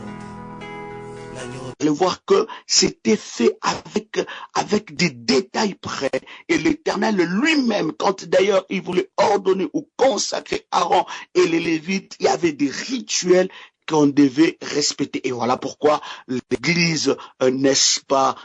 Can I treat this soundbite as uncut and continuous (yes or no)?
no